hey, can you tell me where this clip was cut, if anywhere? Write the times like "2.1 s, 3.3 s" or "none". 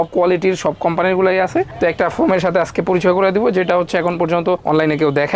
none